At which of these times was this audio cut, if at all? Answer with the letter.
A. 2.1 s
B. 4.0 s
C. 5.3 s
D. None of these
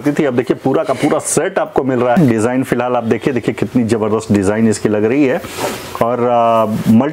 A